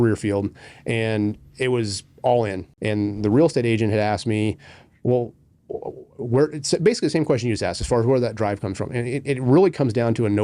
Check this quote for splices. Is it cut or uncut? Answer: cut